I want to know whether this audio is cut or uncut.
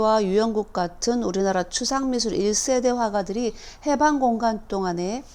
uncut